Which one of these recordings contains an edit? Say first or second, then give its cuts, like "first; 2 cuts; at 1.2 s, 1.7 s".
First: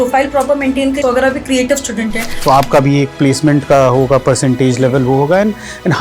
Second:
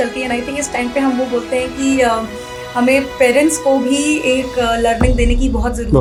first; 2 cuts; at 1.0 s, 2.3 s